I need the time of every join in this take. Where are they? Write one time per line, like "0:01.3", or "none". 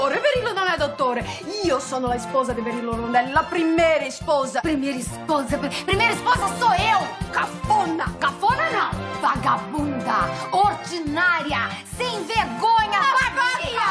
none